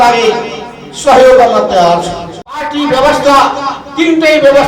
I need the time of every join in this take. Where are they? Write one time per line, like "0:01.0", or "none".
0:02.5

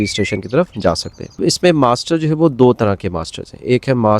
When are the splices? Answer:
0:01.4

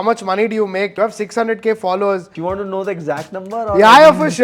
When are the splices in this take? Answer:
0:00.9
0:02.3

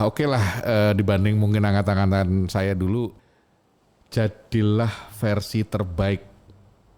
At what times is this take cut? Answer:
0:03.3

